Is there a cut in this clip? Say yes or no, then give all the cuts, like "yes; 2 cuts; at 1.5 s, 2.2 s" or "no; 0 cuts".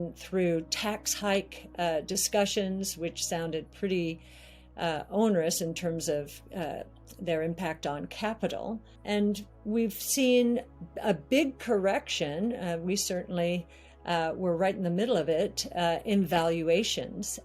yes; 1 cut; at 8.9 s